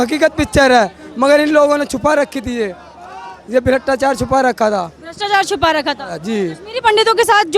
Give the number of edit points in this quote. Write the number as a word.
zero